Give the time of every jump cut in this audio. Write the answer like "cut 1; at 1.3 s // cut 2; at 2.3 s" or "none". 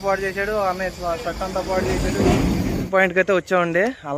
cut 1; at 2.8 s